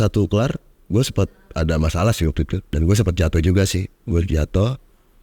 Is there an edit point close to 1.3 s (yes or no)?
no